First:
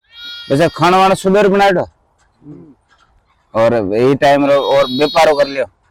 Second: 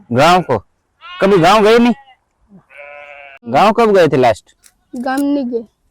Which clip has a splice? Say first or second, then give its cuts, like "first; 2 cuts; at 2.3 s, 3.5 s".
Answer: second; 1 cut; at 3.5 s